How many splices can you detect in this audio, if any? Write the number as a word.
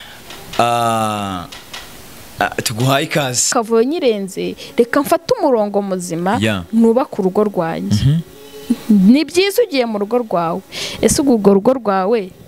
one